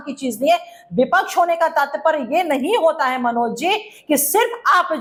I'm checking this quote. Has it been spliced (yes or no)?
no